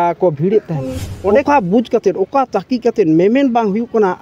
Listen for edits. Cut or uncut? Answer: cut